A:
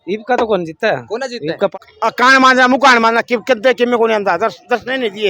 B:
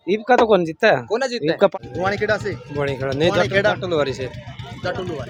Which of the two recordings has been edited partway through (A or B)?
A